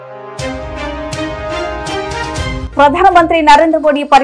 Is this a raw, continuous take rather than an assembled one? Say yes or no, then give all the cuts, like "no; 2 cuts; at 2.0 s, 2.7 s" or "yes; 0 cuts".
no; 1 cut; at 2.6 s